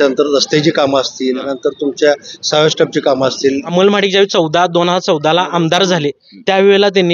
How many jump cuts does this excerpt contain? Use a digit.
2